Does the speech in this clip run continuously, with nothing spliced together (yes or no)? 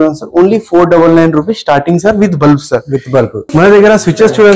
no